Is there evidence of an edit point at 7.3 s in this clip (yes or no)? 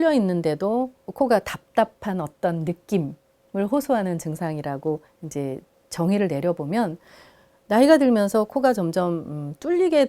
no